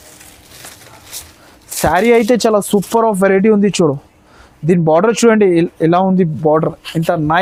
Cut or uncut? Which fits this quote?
uncut